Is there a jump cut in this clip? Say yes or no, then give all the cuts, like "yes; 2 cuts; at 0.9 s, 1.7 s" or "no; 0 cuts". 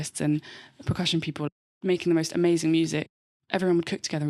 yes; 2 cuts; at 1.5 s, 3.0 s